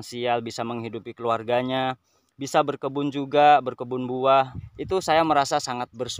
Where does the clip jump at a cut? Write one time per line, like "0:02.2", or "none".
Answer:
0:04.5